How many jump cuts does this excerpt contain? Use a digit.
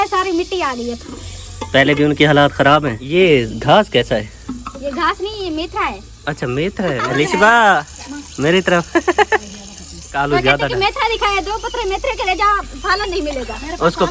4